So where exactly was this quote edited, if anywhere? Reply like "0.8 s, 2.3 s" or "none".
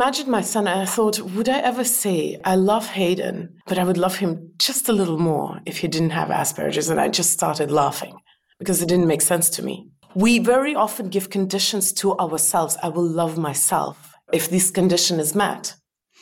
2.4 s, 3.5 s, 10.0 s, 14.3 s